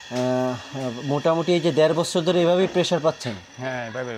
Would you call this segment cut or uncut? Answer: uncut